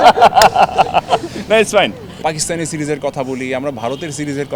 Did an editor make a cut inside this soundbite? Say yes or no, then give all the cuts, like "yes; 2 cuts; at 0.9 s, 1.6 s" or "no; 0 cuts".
yes; 1 cut; at 2.2 s